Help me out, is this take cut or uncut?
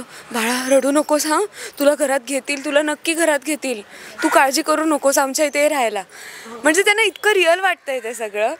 uncut